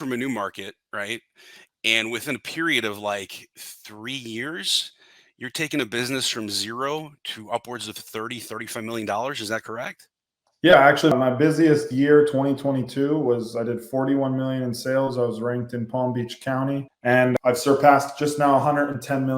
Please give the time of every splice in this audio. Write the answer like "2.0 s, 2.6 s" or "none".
11.1 s, 17.2 s